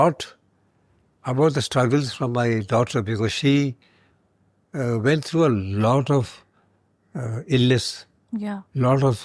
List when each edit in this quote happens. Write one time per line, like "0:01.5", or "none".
none